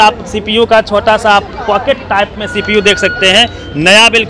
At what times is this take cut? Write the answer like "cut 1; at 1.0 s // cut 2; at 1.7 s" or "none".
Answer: none